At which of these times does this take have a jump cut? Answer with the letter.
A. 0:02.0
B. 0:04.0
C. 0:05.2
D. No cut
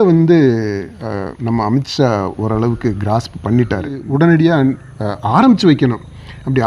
B